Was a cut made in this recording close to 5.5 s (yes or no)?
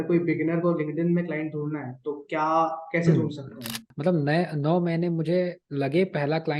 no